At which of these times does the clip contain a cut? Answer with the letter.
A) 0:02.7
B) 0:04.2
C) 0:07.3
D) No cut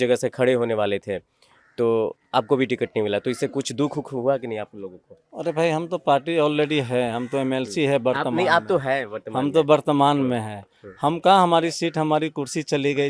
D